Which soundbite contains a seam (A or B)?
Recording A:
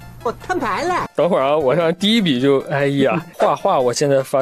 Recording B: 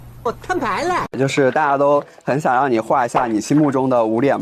A